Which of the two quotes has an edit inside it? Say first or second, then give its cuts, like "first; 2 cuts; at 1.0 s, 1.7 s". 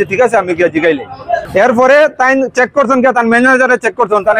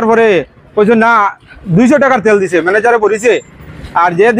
first; 1 cut; at 1.4 s